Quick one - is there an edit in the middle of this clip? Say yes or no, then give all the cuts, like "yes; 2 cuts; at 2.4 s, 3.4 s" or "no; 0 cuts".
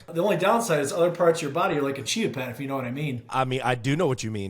yes; 1 cut; at 3.3 s